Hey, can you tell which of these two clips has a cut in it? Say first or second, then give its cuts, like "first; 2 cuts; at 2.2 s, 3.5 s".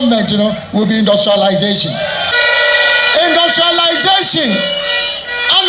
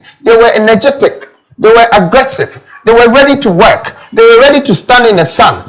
first; 1 cut; at 2.3 s